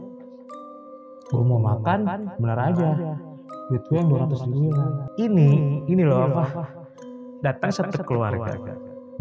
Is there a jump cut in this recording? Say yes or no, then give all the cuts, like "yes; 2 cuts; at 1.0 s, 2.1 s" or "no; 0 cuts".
yes; 1 cut; at 5.0 s